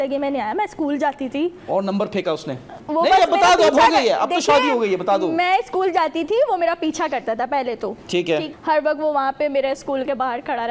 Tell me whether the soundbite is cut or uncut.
cut